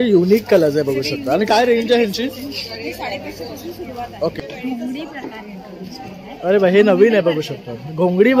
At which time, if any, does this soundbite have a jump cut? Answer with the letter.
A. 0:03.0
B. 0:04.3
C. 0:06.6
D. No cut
B